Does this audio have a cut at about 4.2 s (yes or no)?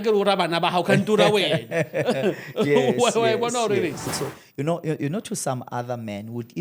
yes